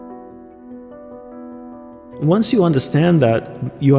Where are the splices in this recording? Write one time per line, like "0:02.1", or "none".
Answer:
0:02.0